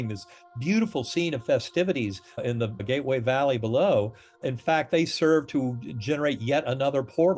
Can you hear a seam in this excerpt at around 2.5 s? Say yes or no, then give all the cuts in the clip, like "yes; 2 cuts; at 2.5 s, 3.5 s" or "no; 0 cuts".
yes; 2 cuts; at 2.5 s, 4.4 s